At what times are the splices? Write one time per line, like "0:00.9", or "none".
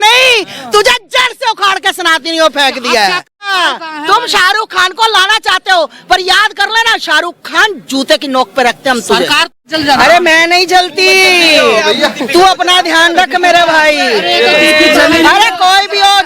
0:03.4
0:09.5